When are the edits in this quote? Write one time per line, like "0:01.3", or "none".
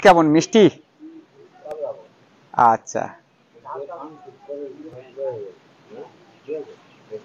none